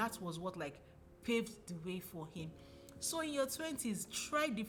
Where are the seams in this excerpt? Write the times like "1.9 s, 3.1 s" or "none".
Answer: none